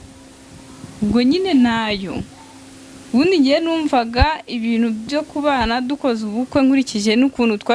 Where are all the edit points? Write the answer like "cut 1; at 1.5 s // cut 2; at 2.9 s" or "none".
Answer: none